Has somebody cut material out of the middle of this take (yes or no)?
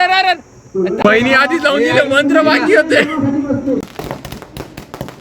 yes